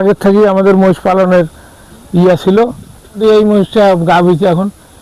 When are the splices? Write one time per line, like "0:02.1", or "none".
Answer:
0:03.2

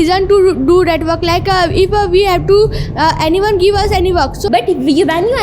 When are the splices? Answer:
0:04.4

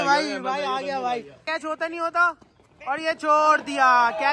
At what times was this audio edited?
0:01.4

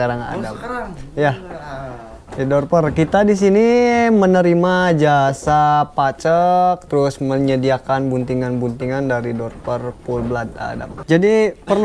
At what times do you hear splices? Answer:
0:10.9

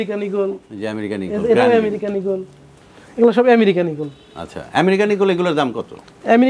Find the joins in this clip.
none

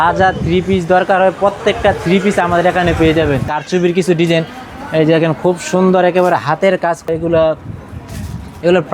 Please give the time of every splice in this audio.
0:03.6
0:07.1

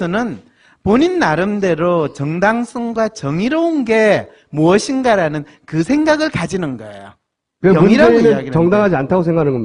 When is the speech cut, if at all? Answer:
none

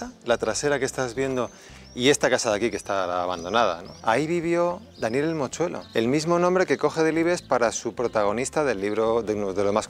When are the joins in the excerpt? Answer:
0:03.9
0:05.8

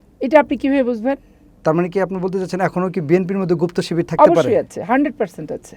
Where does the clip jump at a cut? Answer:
none

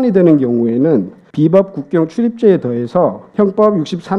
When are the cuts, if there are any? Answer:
0:01.2
0:03.2

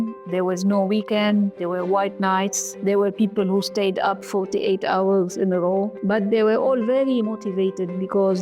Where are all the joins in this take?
0:02.7
0:04.2
0:05.9

